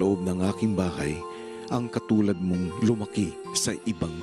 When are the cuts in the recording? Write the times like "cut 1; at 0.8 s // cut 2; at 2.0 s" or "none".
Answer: cut 1; at 2.6 s